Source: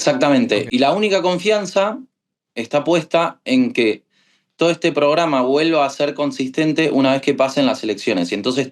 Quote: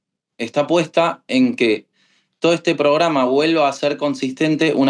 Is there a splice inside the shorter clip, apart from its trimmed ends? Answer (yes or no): no